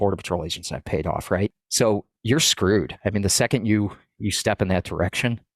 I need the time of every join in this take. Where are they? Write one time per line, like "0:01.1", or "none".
0:01.6